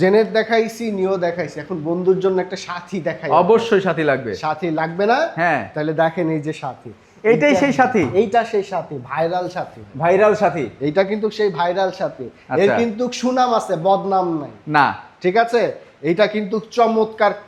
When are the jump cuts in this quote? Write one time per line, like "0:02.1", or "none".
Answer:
none